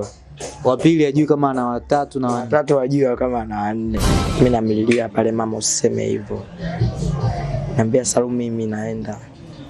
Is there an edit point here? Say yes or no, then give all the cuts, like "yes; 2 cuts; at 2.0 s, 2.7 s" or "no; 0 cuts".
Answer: yes; 1 cut; at 4.0 s